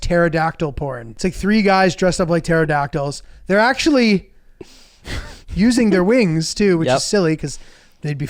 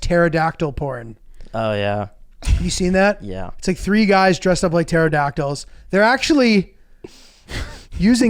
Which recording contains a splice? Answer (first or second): first